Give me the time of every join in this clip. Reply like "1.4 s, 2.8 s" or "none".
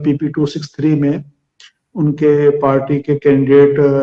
none